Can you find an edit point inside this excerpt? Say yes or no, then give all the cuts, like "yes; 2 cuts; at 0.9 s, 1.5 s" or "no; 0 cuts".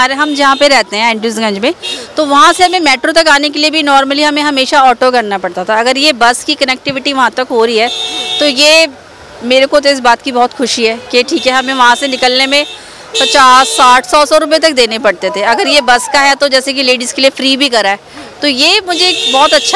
no; 0 cuts